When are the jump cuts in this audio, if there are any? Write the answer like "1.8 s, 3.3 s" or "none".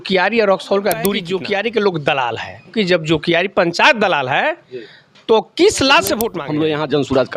1.2 s, 2.7 s, 6.4 s